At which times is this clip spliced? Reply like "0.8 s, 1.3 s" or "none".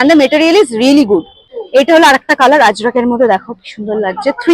1.6 s